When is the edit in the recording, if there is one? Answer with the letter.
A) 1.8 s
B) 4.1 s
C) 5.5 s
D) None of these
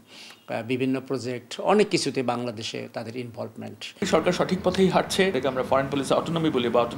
B